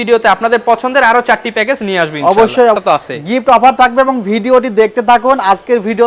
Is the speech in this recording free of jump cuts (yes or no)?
no